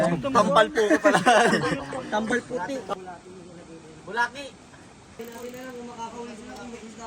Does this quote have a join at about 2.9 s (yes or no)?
yes